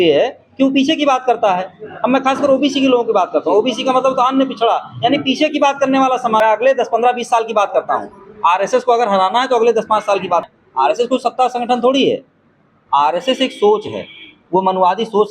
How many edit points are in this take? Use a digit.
2